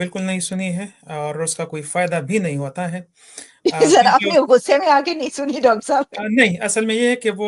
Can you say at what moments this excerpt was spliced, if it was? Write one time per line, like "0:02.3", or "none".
none